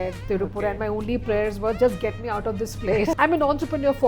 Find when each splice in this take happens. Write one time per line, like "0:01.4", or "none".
0:03.2